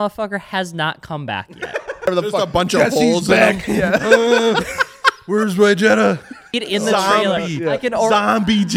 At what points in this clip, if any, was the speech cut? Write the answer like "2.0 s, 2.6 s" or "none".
2.1 s, 6.5 s